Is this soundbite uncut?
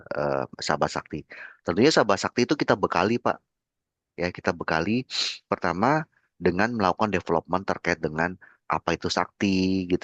yes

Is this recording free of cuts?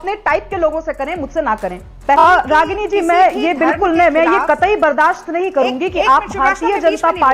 no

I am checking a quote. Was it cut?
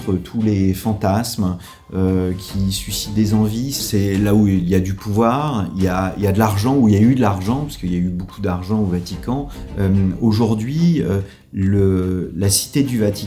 yes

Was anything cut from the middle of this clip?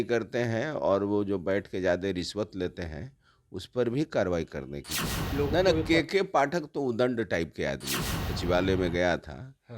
yes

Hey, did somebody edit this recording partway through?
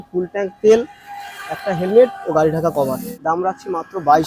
yes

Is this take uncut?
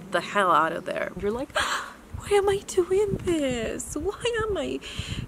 no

